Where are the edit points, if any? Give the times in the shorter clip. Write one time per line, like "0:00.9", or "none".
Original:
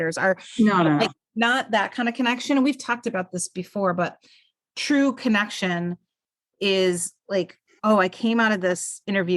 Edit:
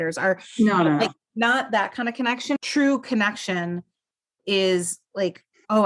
0:02.6